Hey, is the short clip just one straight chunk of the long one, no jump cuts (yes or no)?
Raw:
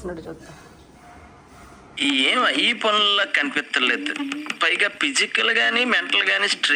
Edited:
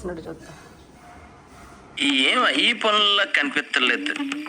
yes